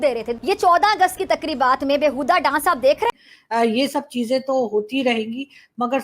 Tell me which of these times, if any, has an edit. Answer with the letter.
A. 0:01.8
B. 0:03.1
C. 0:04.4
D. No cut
B